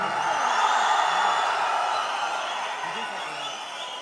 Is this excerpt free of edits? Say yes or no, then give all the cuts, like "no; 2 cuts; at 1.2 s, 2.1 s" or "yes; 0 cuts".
yes; 0 cuts